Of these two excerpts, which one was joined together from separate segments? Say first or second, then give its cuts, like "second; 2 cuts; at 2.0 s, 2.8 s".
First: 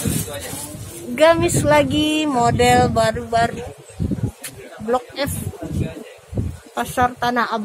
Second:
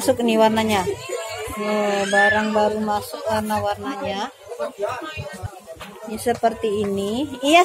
second; 1 cut; at 5.5 s